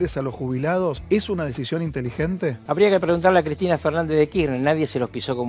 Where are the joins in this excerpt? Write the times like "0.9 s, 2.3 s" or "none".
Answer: 1.0 s, 2.6 s